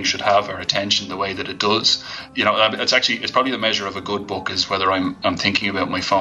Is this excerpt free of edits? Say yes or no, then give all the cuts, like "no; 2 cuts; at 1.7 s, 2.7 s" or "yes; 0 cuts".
no; 1 cut; at 2.1 s